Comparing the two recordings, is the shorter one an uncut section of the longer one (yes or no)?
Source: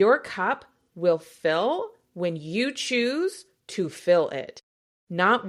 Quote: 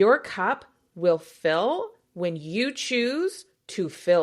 yes